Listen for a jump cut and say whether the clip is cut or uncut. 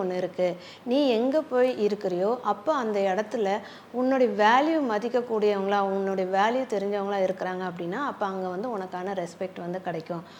uncut